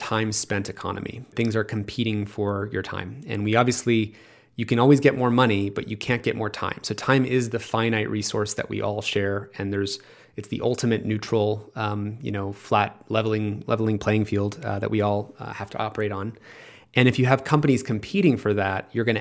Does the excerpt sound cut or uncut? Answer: cut